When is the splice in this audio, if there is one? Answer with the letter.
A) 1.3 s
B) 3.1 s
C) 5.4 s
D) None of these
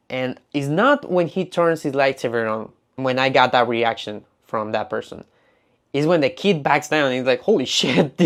D